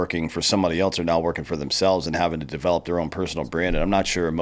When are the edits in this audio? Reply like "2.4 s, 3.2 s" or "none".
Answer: none